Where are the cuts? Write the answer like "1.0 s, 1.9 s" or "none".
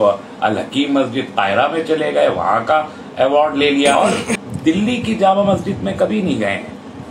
3.9 s